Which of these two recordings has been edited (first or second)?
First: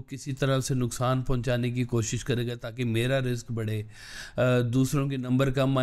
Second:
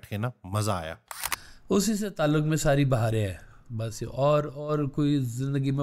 second